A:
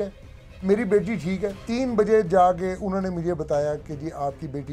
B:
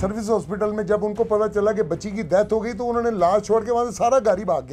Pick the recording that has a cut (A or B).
A